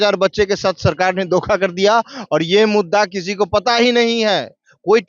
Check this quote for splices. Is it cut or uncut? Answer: uncut